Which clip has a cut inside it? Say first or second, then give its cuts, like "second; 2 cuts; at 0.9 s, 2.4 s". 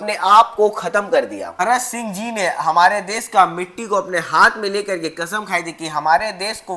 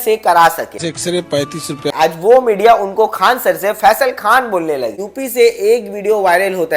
second; 2 cuts; at 1.9 s, 4.9 s